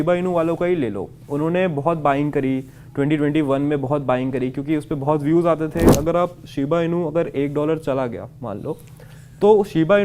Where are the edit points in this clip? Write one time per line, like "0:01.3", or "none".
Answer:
0:05.9